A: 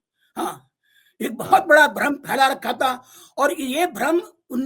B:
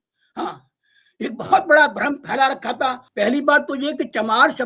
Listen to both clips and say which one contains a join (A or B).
B